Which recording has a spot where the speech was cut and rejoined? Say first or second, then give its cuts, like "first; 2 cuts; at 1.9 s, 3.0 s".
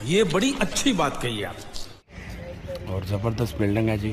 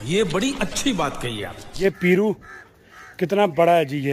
second; 1 cut; at 1.8 s